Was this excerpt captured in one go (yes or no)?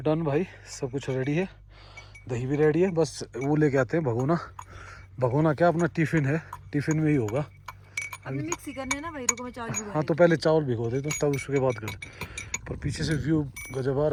yes